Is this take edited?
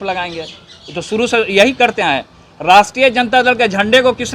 no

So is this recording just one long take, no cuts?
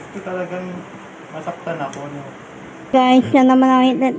no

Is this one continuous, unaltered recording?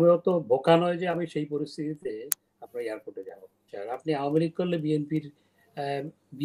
no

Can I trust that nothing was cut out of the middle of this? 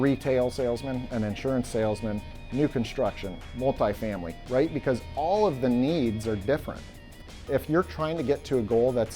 no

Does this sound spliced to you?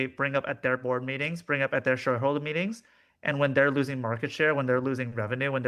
no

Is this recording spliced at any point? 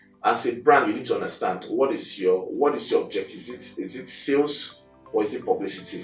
no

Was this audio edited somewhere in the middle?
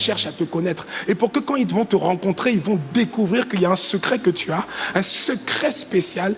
no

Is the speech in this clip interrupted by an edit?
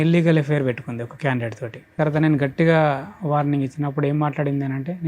yes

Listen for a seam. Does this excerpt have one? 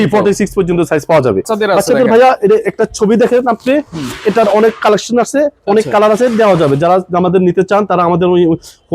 yes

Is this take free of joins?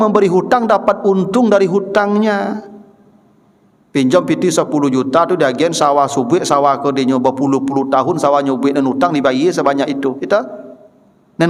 yes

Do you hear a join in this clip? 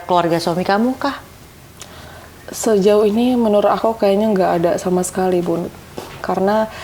no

